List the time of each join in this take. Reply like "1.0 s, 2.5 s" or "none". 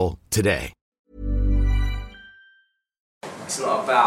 3.1 s